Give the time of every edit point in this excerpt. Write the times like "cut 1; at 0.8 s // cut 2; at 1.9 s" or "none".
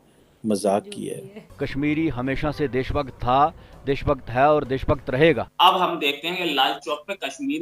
cut 1; at 1.8 s // cut 2; at 5.5 s